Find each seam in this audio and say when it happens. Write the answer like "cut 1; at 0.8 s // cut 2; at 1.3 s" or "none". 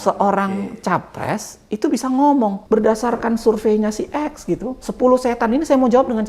cut 1; at 2.6 s